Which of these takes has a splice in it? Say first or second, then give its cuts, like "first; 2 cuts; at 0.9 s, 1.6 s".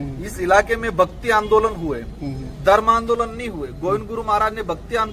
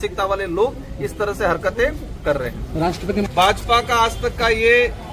second; 1 cut; at 2.8 s